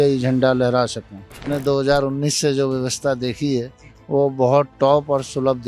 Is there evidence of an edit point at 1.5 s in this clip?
yes; 1 cut; at 1.5 s

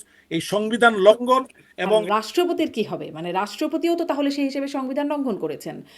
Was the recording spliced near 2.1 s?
yes; 1 cut; at 2.1 s

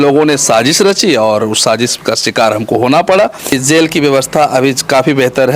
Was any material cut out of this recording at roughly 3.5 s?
yes; 1 cut; at 3.5 s

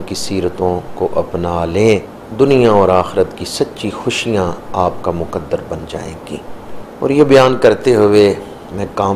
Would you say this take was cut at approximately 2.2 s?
yes; 2 cuts; at 2.2 s, 6.8 s

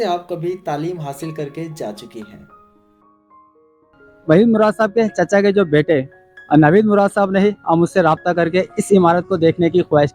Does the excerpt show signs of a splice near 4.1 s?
yes; 1 cut; at 4.1 s

